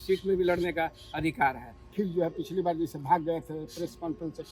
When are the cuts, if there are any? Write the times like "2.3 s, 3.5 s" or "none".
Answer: 1.8 s

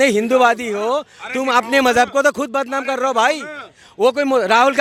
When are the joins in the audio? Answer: none

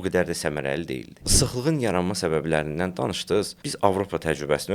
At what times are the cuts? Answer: 1.3 s, 3.6 s

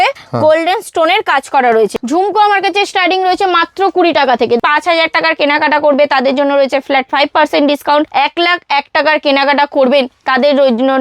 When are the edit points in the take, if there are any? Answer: 2.0 s, 4.6 s, 8.1 s

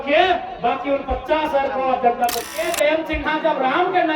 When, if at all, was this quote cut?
2.5 s

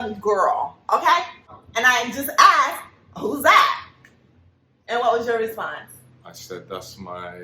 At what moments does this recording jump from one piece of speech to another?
1.4 s

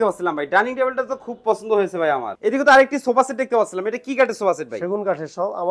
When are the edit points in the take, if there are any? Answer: 2.3 s

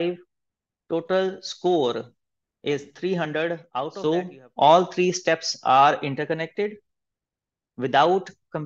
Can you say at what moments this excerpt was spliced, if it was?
3.9 s

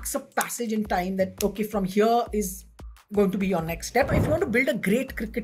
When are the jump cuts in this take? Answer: 4.1 s

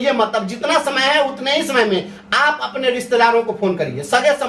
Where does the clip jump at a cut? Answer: none

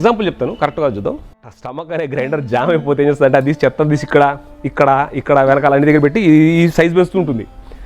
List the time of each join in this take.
1.3 s

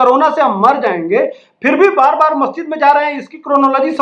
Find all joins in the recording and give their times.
none

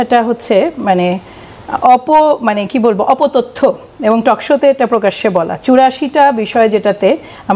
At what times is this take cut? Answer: none

